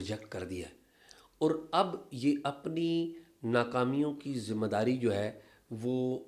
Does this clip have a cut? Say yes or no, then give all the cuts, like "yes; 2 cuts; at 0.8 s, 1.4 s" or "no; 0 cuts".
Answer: no; 0 cuts